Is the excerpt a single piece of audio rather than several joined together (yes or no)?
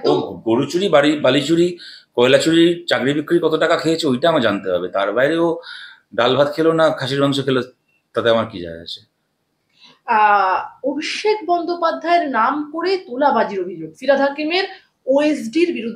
yes